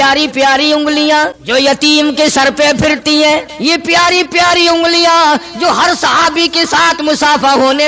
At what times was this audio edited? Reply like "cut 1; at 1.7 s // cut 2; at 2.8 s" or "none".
cut 1; at 1.4 s // cut 2; at 3.5 s